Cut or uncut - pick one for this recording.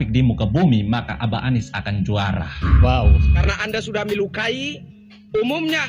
cut